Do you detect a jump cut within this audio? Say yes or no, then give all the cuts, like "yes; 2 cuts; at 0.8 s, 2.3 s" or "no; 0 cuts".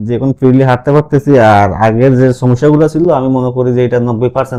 no; 0 cuts